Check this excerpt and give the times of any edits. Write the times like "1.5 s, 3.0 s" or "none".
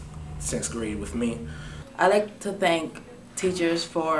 1.8 s